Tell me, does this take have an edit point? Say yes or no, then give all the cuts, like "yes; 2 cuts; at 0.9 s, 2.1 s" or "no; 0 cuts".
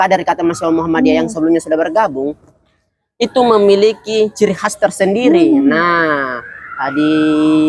no; 0 cuts